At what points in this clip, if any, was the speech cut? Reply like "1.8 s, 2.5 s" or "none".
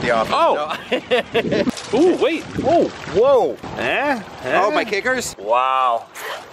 1.7 s, 3.7 s, 5.3 s

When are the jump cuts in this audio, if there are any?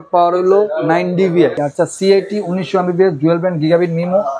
1.6 s

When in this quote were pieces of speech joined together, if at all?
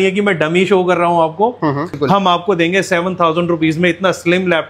1.9 s

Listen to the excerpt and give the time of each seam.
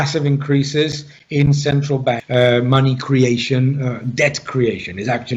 2.2 s

